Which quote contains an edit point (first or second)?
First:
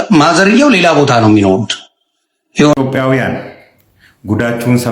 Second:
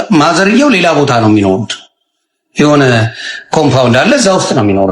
first